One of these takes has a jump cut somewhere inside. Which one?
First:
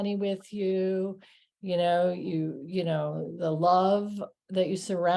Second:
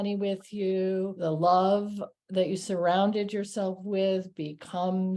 second; 1 cut; at 1.2 s

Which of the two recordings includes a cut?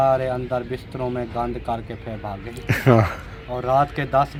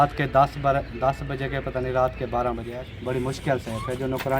second; 1 cut; at 2.7 s

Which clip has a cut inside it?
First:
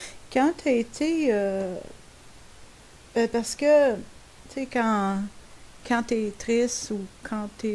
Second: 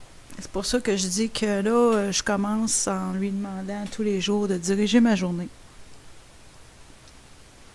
first; 1 cut; at 3.8 s

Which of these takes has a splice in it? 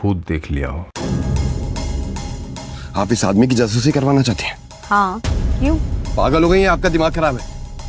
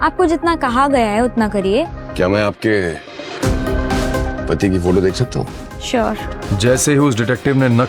second; 2 cuts; at 2.0 s, 6.4 s

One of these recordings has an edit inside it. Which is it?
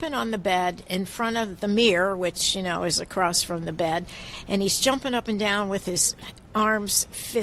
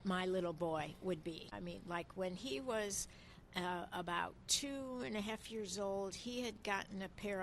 second; 1 cut; at 1.6 s

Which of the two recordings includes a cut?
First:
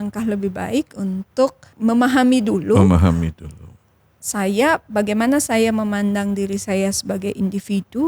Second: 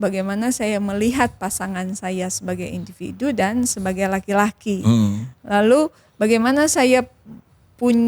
first; 1 cut; at 1.7 s

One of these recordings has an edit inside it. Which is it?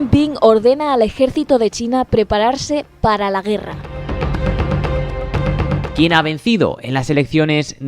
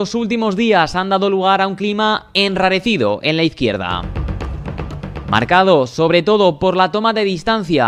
first; 1 cut; at 5.9 s

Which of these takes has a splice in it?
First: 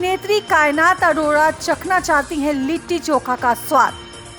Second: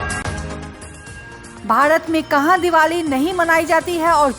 second; 1 cut; at 1.5 s

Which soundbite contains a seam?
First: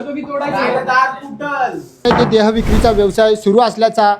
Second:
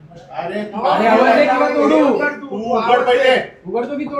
first; 1 cut; at 2.1 s

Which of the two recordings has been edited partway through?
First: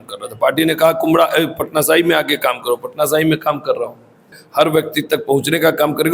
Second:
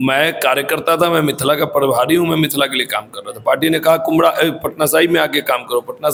first; 1 cut; at 4.4 s

